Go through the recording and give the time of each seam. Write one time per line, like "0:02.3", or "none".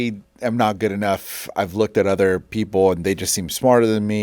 none